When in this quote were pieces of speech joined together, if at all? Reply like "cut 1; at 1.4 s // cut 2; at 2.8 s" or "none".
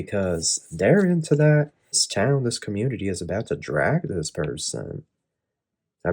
cut 1; at 2.0 s